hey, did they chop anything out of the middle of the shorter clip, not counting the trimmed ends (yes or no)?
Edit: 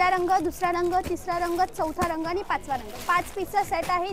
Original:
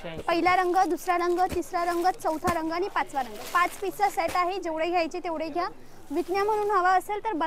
no